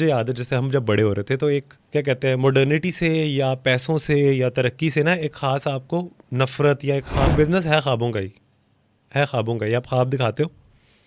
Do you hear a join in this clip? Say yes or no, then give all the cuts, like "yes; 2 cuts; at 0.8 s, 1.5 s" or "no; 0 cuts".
yes; 2 cuts; at 1.8 s, 7.3 s